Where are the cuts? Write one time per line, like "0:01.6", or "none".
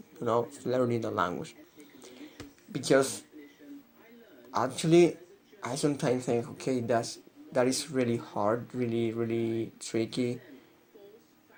none